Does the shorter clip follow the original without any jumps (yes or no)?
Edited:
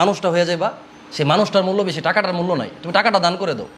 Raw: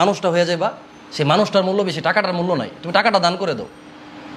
yes